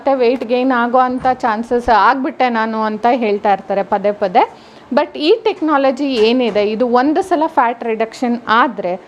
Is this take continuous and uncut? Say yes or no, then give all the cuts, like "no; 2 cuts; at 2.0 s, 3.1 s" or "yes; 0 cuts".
yes; 0 cuts